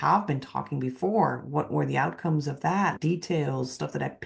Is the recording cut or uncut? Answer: cut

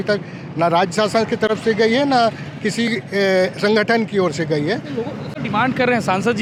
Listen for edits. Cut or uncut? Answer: uncut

